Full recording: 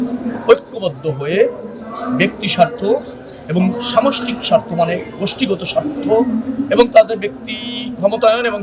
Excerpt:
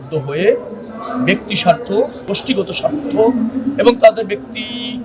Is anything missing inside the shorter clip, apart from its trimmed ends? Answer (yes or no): yes